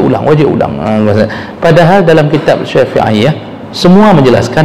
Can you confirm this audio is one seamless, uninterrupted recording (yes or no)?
yes